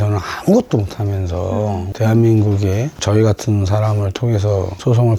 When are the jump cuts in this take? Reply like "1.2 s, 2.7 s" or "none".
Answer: 1.9 s